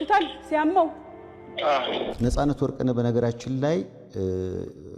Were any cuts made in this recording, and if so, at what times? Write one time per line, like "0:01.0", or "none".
0:02.4